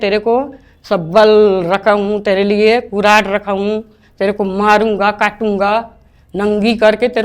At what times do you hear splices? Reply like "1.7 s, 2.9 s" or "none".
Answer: none